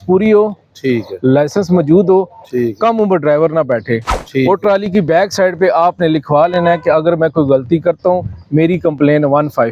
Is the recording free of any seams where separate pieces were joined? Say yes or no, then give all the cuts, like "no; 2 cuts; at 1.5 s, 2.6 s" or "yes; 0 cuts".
yes; 0 cuts